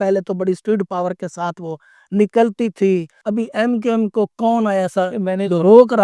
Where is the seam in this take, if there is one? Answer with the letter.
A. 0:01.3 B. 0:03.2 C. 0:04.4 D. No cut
B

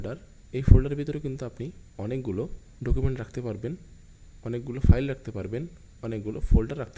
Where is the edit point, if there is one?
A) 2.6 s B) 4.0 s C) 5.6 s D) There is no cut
A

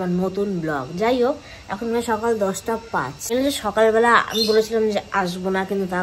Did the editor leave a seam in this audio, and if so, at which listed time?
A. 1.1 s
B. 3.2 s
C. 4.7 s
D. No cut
B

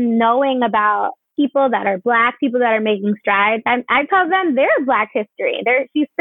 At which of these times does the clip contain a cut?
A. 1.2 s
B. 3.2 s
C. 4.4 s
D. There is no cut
A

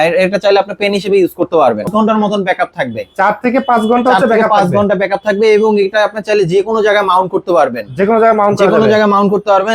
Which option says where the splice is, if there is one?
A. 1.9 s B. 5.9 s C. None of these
A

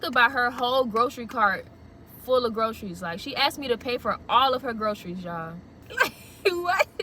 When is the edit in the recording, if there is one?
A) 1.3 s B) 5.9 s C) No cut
B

